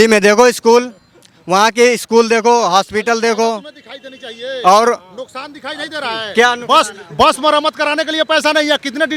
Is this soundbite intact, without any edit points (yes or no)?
yes